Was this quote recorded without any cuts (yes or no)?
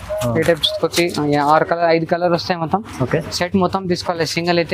yes